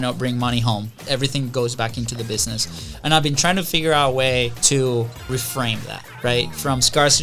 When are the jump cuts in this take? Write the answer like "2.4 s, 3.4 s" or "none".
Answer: 1.0 s, 4.6 s, 5.3 s